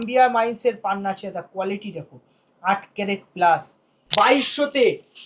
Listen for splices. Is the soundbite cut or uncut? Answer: cut